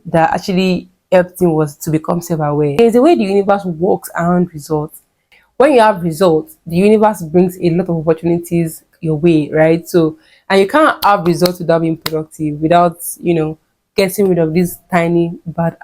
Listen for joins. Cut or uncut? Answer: cut